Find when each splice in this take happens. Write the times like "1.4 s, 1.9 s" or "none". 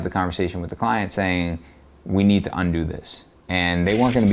none